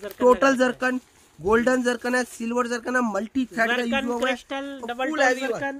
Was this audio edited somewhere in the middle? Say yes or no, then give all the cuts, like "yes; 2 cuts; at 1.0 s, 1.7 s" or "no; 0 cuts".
no; 0 cuts